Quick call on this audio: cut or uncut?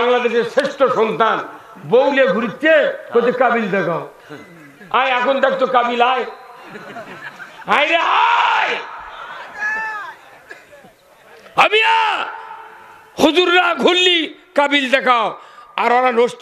uncut